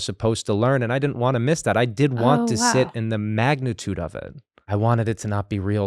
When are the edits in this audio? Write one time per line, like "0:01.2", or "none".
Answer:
0:04.7